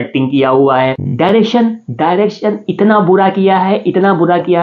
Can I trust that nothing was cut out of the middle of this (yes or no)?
no